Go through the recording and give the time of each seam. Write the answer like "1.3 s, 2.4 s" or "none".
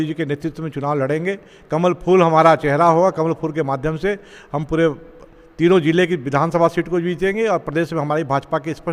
none